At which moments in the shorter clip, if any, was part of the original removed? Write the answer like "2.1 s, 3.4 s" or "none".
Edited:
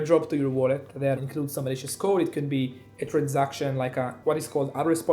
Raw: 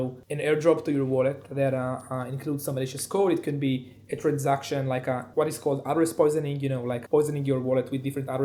1.2 s